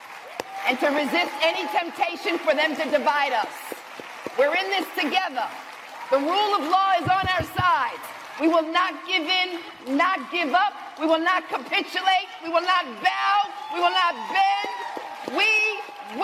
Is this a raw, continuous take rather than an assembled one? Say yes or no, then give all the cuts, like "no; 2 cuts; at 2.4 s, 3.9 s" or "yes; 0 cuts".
yes; 0 cuts